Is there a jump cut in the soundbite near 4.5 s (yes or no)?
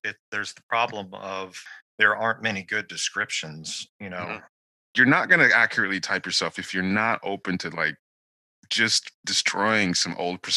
yes